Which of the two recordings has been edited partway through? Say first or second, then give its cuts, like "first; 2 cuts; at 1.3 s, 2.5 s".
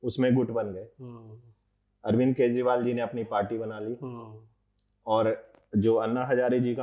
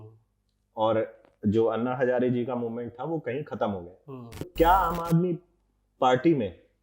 second; 1 cut; at 4.5 s